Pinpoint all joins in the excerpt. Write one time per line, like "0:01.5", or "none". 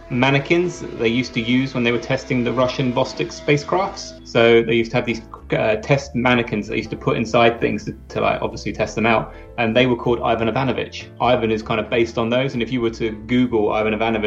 0:11.1